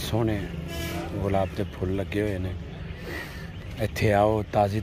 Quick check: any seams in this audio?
no; 0 cuts

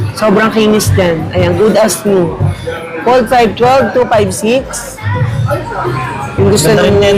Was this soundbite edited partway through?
no; 0 cuts

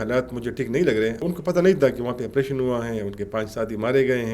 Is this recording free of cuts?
no; 1 cut; at 1.2 s

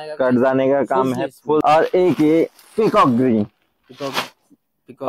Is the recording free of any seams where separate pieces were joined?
no; 1 cut; at 1.6 s

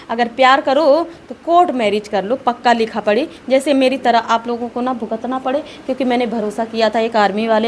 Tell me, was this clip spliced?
no; 0 cuts

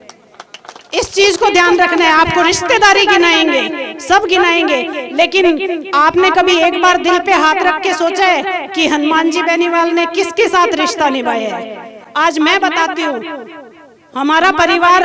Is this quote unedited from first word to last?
yes; 0 cuts

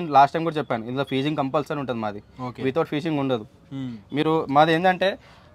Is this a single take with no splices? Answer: yes; 0 cuts

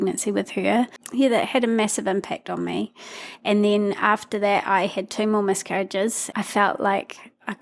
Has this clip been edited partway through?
yes; 2 cuts; at 1.0 s, 6.2 s

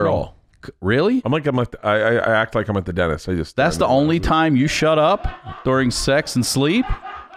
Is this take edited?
no; 0 cuts

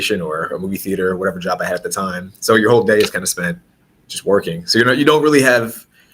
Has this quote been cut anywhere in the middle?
no; 0 cuts

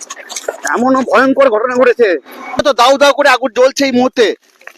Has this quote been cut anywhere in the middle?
yes; 1 cut; at 2.6 s

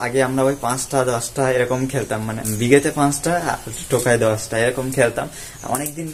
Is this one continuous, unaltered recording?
no; 1 cut; at 2.5 s

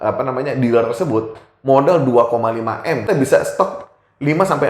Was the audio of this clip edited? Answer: yes; 1 cut; at 3.0 s

